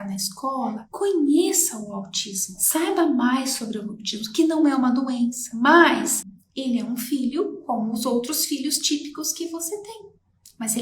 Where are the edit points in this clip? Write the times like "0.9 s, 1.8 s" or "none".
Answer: 6.4 s